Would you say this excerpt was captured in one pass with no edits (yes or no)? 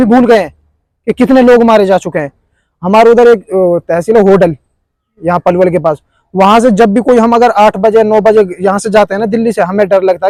yes